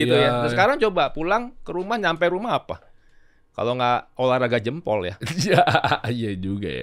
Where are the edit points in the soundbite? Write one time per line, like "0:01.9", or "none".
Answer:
none